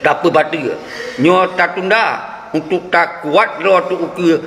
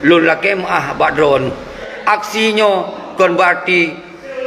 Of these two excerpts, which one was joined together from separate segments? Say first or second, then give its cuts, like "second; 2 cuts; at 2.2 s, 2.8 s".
second; 1 cut; at 1.9 s